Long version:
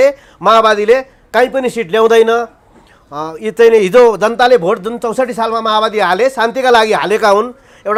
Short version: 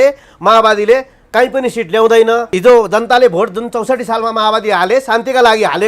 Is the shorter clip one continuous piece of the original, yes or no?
no